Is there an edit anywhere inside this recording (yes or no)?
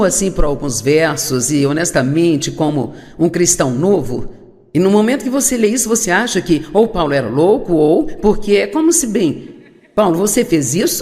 yes